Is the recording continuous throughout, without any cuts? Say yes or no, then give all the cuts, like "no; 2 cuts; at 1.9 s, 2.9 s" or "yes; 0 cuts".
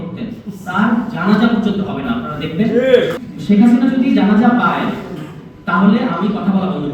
no; 1 cut; at 3.2 s